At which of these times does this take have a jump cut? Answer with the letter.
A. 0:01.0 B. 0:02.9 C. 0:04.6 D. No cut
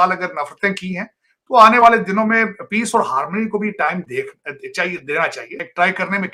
D